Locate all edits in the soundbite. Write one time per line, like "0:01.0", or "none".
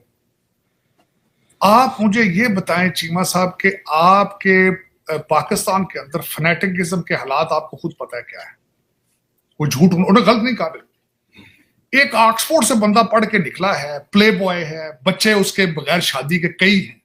none